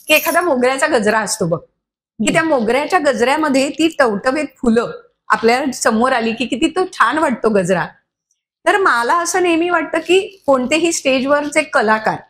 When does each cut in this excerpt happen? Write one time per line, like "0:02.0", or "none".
none